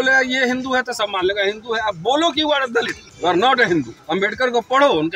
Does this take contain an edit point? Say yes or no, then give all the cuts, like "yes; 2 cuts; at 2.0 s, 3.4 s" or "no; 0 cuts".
yes; 2 cuts; at 3.0 s, 4.0 s